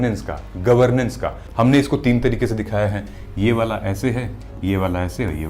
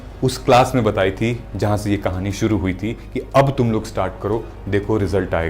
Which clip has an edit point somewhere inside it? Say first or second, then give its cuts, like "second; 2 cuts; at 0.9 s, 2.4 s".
first; 1 cut; at 1.4 s